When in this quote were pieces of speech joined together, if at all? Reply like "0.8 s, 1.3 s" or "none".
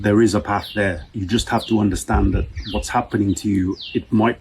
1.1 s